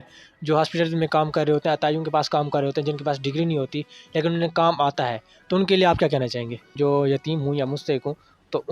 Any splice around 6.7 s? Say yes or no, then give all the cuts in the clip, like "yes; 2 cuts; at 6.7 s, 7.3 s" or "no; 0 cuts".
yes; 1 cut; at 6.7 s